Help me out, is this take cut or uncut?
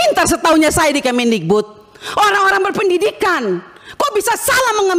uncut